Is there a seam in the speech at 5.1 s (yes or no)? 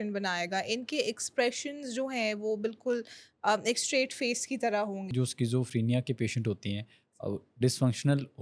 yes